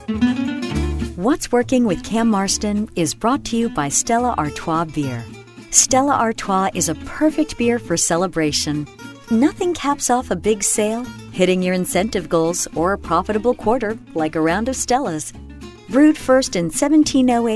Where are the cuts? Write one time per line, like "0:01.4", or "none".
0:01.1

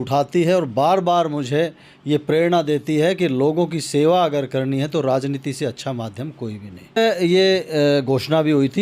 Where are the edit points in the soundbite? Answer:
0:07.0

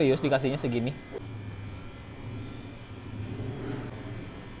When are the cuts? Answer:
0:01.2
0:03.9

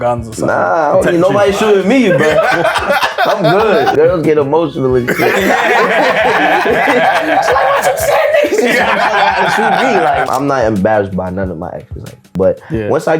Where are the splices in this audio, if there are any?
0:03.9
0:10.2
0:12.2

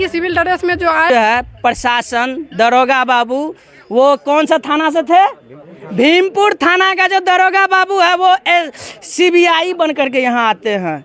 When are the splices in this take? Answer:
0:01.1

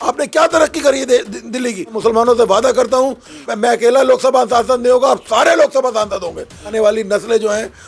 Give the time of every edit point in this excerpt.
0:01.9
0:03.5
0:06.7

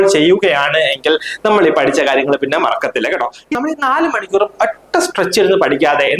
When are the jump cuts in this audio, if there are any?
0:03.5

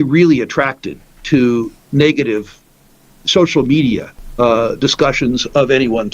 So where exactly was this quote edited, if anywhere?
0:04.2

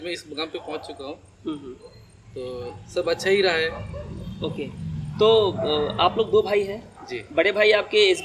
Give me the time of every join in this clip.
none

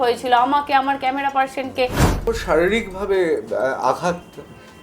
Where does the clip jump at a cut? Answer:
0:02.2

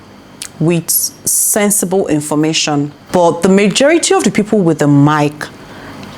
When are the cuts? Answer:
0:03.0

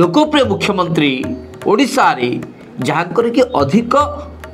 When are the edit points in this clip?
none

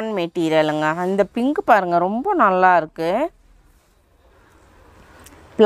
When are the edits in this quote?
none

